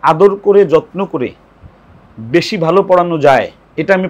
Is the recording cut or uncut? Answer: uncut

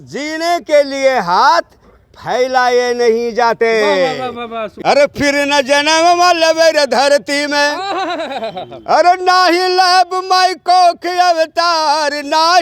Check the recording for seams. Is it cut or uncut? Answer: cut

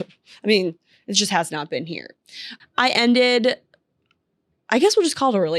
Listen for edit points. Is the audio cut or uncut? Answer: cut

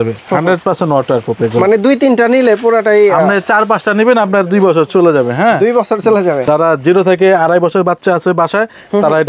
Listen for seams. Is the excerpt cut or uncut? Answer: uncut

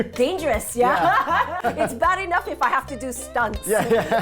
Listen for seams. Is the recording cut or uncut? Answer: cut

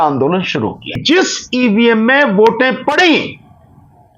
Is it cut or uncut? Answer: cut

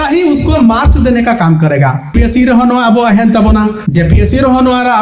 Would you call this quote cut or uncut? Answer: cut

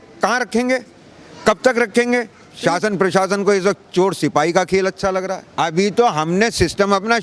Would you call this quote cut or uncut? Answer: cut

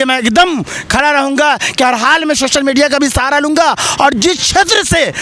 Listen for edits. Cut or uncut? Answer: uncut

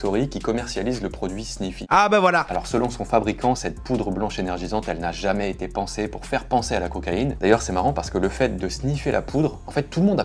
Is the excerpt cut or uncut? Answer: cut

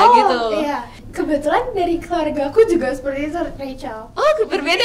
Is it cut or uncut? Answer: cut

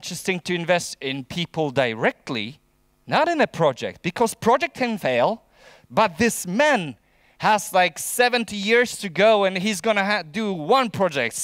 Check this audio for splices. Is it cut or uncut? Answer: uncut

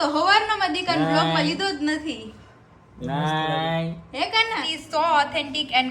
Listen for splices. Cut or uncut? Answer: cut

